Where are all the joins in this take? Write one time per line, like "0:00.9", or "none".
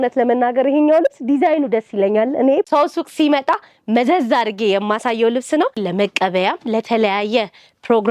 0:02.7
0:05.8